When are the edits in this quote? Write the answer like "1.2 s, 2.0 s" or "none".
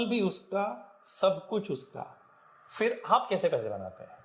none